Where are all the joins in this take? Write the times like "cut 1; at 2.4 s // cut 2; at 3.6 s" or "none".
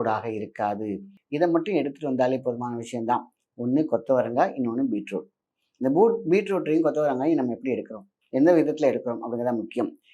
cut 1; at 1.1 s